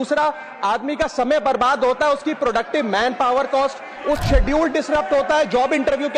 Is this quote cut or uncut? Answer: cut